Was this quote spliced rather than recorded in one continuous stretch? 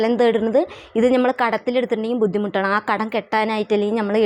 no; 0 cuts

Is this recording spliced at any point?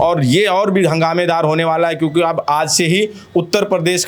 no; 0 cuts

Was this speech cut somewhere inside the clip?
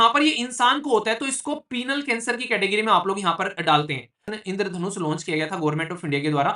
yes; 1 cut; at 4.2 s

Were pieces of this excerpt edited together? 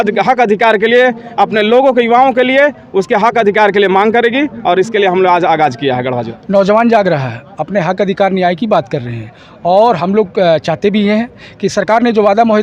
yes; 1 cut; at 6.3 s

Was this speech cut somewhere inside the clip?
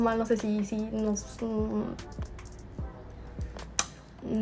no; 0 cuts

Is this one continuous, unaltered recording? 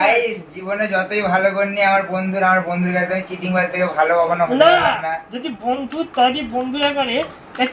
yes; 0 cuts

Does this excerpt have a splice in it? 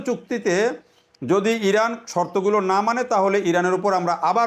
no; 0 cuts

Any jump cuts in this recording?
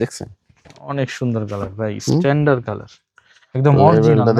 no; 0 cuts

